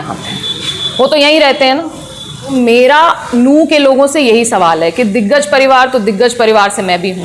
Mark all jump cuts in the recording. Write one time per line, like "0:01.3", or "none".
0:02.5

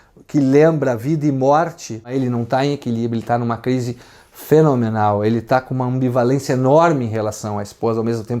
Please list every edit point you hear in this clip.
0:02.1

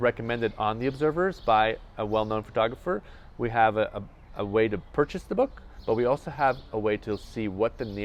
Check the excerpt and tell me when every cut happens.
none

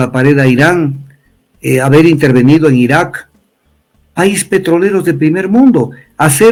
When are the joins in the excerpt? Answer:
none

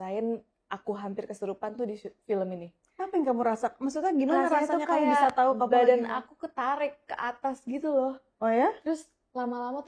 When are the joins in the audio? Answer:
none

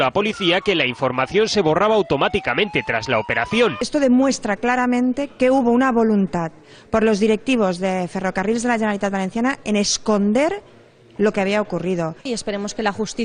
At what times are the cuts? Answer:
none

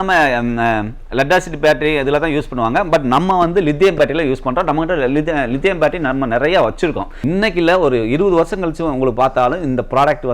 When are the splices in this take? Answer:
0:07.1

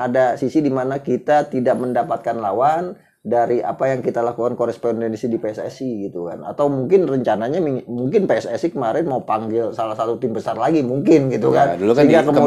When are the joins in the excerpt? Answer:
none

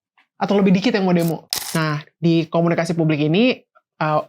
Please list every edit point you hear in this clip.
0:01.5

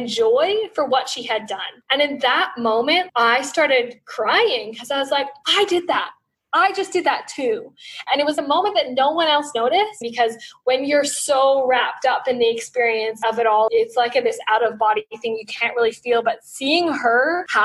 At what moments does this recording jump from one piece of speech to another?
0:08.0
0:10.0

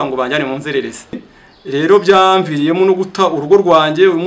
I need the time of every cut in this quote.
0:01.1

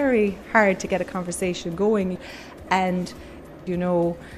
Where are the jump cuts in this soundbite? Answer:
0:02.2
0:03.5

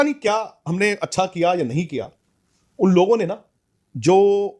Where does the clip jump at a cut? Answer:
none

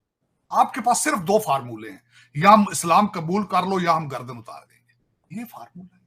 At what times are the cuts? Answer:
none

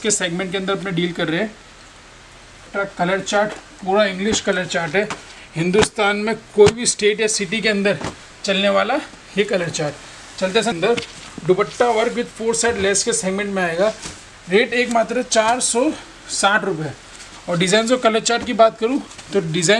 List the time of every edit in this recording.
0:02.7
0:10.7

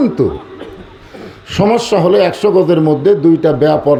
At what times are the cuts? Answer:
none

